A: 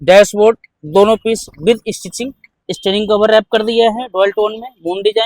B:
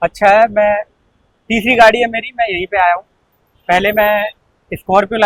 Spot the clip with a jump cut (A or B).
A